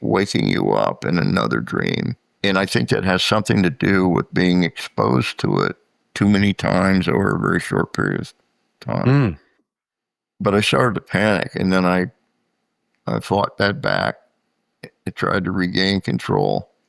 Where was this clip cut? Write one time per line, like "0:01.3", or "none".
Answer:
0:02.3